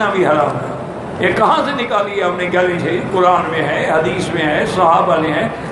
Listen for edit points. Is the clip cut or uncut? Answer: uncut